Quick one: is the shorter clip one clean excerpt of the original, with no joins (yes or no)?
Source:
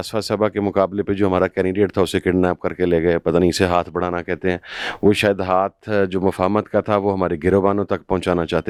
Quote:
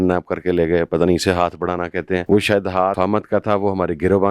no